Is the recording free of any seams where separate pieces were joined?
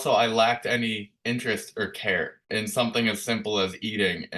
yes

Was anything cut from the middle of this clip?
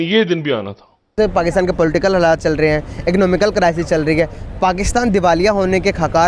no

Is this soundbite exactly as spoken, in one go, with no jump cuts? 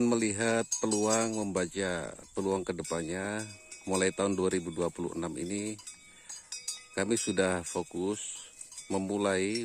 yes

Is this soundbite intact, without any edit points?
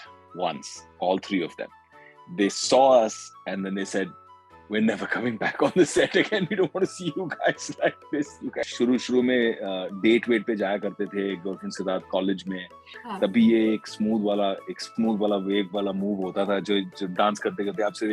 no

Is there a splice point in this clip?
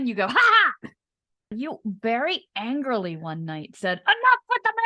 yes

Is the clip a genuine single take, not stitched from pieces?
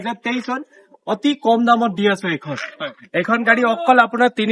yes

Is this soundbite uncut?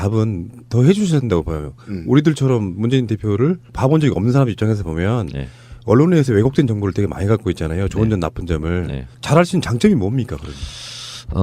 no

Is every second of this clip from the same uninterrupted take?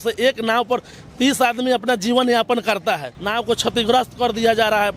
no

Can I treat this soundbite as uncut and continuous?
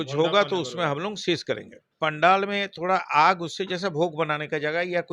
no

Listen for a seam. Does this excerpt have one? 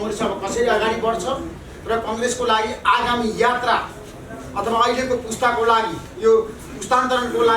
no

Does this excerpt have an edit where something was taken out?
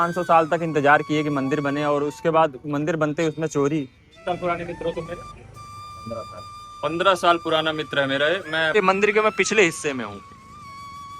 yes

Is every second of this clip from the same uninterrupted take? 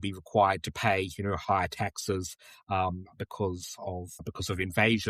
no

